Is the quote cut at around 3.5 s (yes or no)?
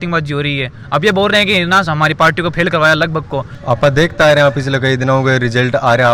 yes